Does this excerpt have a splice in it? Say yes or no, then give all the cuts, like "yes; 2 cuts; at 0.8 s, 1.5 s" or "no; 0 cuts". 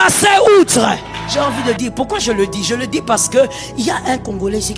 yes; 1 cut; at 1.2 s